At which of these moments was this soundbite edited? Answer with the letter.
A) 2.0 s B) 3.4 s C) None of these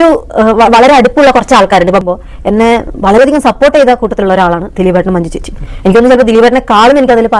A